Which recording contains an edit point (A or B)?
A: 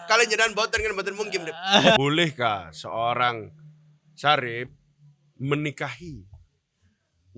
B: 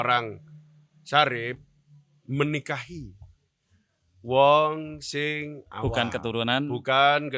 A